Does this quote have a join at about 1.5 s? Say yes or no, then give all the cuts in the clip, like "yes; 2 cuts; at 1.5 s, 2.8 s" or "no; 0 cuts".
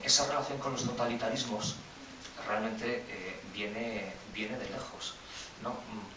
no; 1 cut; at 3.9 s